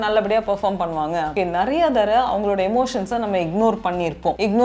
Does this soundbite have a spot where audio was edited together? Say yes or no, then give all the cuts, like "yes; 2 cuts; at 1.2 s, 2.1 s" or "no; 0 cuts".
yes; 1 cut; at 1.3 s